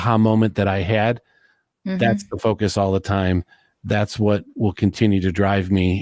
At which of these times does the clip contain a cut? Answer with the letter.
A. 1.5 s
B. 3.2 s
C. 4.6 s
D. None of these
D